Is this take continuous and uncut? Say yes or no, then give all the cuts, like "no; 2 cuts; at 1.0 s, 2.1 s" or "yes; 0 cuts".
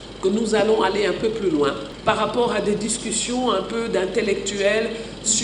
no; 1 cut; at 1.9 s